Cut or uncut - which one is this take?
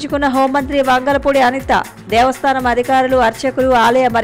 uncut